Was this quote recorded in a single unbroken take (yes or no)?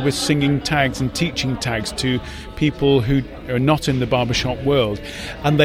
yes